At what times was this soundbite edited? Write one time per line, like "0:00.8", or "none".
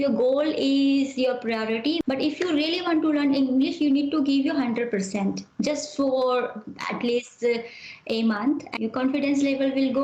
0:02.0
0:08.7